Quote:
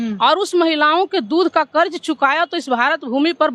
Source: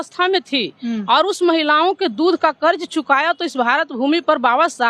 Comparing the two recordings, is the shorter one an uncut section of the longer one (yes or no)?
yes